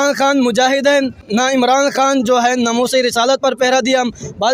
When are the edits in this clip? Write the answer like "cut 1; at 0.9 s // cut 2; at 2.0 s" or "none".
cut 1; at 1.2 s